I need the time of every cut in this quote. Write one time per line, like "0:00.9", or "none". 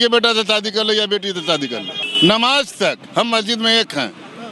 0:02.0